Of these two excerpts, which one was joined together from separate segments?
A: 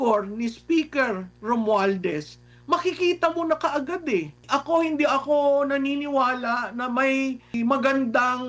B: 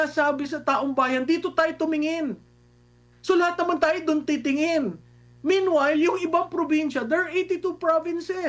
A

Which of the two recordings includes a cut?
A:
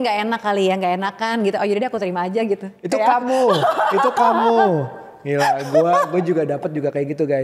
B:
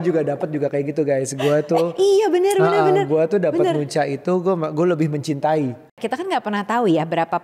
B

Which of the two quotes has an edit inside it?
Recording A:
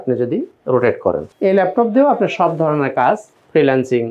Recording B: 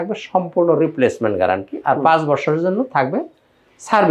A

